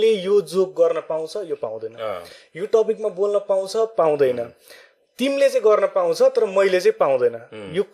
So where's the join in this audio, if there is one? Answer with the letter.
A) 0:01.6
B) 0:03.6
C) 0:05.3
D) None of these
D